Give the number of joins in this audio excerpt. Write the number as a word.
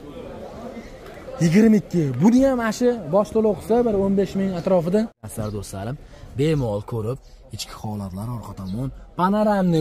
one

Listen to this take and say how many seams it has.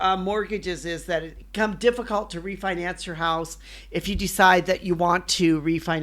one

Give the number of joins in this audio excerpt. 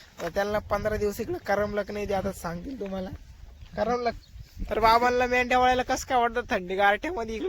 one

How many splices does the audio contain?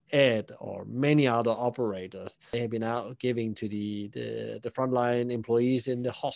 one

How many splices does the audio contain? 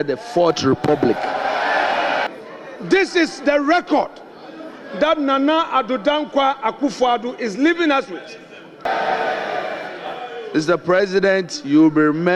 two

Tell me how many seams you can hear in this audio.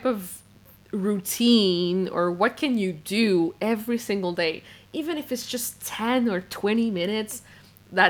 zero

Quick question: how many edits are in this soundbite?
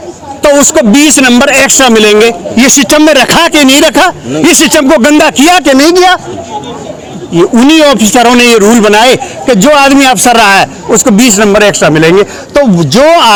zero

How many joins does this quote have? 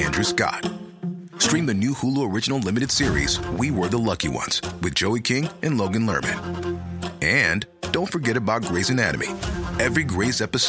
zero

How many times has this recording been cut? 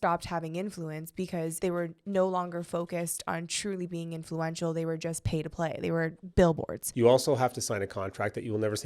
one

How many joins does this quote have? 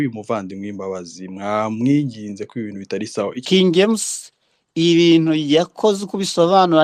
one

